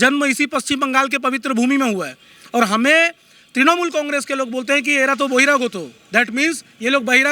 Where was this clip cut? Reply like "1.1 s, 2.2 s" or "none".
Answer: none